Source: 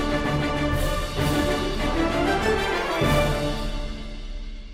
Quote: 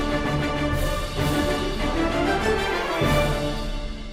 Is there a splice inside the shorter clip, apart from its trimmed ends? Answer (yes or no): no